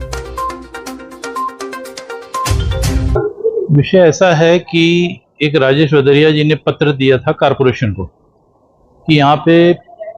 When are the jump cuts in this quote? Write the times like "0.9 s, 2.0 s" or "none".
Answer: 3.5 s